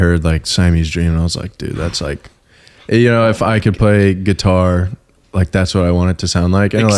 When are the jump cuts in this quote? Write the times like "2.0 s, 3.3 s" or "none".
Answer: none